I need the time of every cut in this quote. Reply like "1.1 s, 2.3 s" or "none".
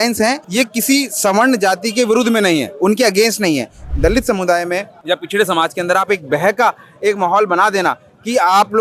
3.8 s